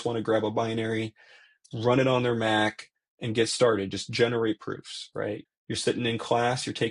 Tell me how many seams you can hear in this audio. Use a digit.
1